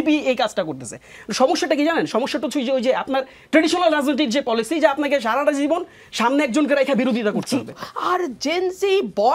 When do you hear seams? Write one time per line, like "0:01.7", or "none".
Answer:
0:07.7